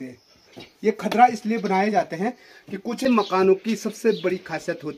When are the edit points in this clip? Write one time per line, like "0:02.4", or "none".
0:03.0

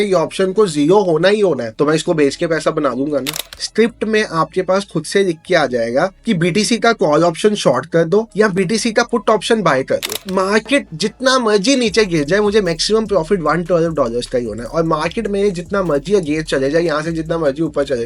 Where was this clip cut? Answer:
0:03.4
0:10.2

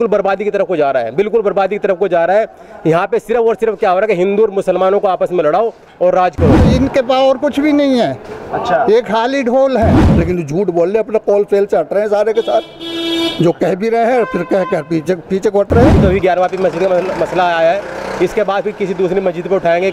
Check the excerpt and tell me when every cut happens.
0:06.7
0:10.1
0:16.0

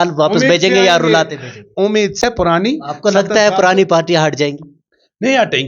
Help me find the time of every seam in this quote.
0:02.2

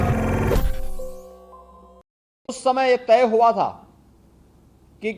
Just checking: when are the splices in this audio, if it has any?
0:02.4

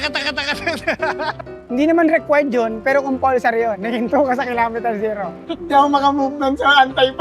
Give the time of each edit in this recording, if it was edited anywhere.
0:01.5
0:05.4

